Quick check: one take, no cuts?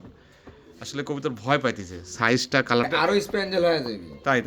no; 1 cut; at 2.8 s

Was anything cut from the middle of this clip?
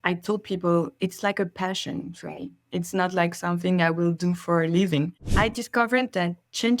yes; 1 cut; at 5.3 s

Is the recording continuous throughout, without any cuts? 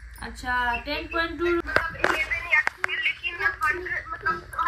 no; 1 cut; at 1.6 s

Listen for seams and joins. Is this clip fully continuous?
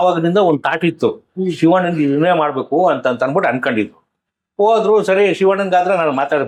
yes; 0 cuts

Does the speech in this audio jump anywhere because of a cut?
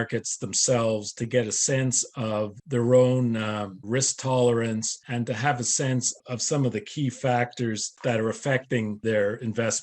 yes; 6 cuts; at 2.6 s, 3.8 s, 5.0 s, 6.2 s, 7.9 s, 9.0 s

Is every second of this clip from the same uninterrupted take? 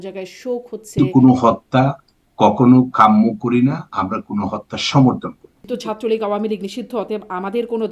no; 2 cuts; at 1.0 s, 5.7 s

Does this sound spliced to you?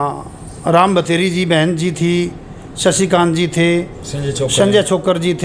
no; 0 cuts

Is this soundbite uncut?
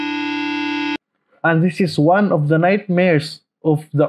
no; 1 cut; at 0.9 s

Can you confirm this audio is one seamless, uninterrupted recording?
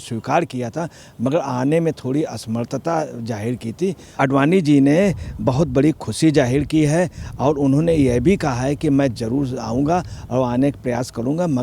no; 1 cut; at 4.2 s

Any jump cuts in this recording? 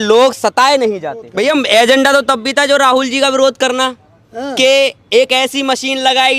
yes; 1 cut; at 1.2 s

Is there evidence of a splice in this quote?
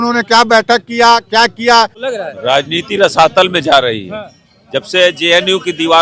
yes; 1 cut; at 2.0 s

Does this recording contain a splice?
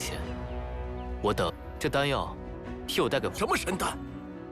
yes; 1 cut; at 3.4 s

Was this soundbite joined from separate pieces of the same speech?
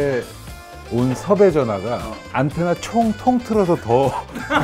no; 0 cuts

